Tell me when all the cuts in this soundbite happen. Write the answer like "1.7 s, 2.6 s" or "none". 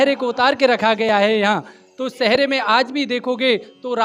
none